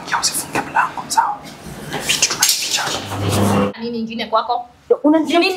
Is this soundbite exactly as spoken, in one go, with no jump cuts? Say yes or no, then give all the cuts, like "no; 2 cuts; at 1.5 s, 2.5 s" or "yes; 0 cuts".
no; 1 cut; at 3.7 s